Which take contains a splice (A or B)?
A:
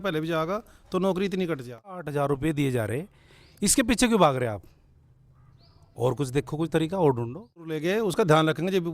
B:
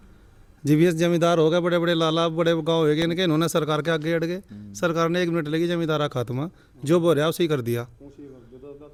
A